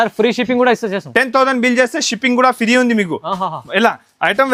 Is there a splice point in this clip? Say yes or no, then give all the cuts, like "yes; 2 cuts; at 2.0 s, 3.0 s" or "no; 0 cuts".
no; 0 cuts